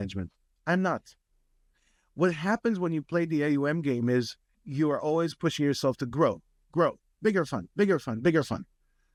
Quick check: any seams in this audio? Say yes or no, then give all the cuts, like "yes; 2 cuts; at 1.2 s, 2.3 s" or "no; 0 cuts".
no; 0 cuts